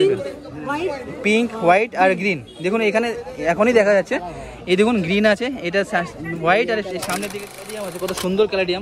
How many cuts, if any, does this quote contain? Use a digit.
1